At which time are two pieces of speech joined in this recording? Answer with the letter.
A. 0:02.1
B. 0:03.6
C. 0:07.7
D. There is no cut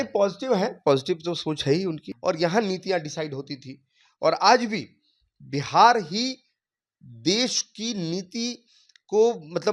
A